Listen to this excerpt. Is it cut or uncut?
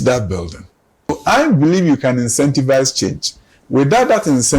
cut